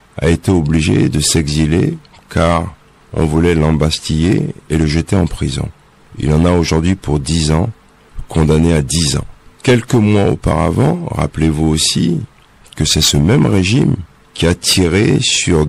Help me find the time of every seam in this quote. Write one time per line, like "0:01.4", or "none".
none